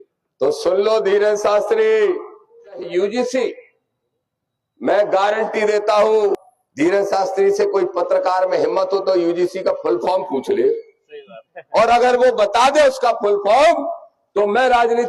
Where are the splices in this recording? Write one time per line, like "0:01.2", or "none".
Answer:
0:02.9
0:06.4